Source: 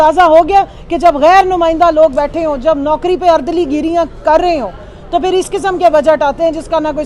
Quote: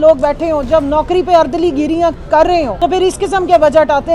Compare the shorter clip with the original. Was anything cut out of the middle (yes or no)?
yes